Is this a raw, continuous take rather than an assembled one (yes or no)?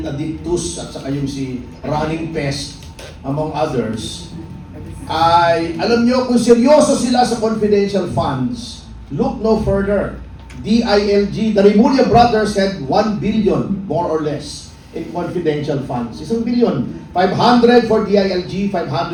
yes